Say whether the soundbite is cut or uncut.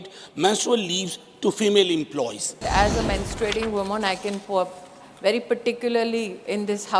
cut